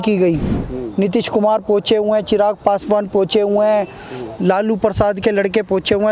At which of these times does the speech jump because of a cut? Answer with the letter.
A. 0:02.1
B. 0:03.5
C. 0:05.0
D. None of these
D